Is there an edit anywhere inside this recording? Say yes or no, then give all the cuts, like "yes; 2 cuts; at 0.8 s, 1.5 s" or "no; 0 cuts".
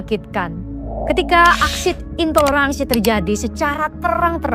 no; 0 cuts